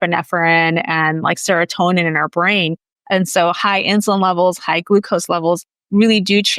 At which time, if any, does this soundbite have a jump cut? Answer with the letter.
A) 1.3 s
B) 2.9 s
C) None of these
B